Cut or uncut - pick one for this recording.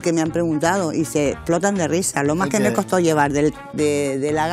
uncut